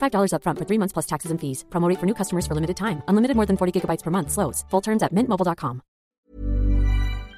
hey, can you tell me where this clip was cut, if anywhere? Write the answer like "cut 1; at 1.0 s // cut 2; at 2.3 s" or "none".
cut 1; at 6.1 s